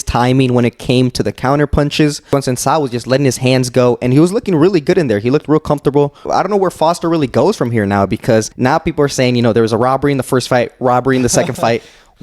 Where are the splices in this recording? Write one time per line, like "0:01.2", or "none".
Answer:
0:02.3
0:06.2
0:08.5